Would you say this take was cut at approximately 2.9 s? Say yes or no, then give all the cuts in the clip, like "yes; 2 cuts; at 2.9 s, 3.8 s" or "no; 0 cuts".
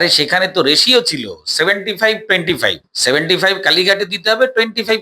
yes; 1 cut; at 2.9 s